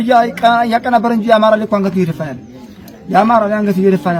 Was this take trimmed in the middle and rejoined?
no; 0 cuts

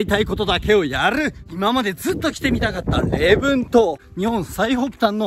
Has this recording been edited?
yes; 2 cuts; at 1.4 s, 4.1 s

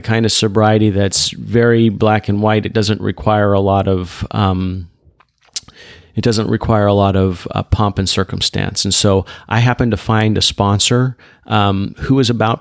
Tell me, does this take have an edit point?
no; 0 cuts

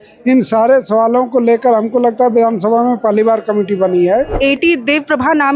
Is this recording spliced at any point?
yes; 1 cut; at 4.3 s

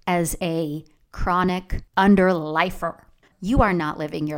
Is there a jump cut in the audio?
yes; 1 cut; at 3.3 s

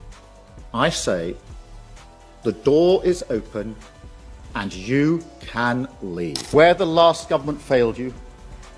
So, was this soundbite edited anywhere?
yes; 1 cut; at 6.4 s

